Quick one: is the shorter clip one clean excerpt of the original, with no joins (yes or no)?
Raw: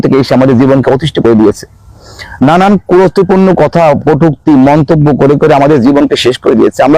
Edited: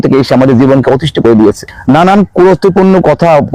no